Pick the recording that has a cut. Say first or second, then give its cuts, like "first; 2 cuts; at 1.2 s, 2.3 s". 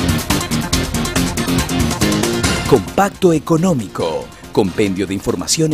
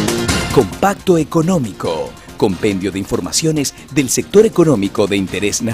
first; 1 cut; at 1.1 s